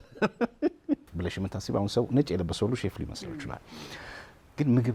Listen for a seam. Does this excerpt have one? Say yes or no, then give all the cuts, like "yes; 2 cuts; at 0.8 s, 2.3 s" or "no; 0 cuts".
yes; 1 cut; at 1.1 s